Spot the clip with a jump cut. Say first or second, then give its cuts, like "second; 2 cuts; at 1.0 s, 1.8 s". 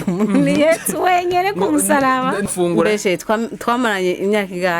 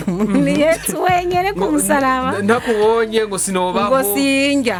first; 1 cut; at 2.5 s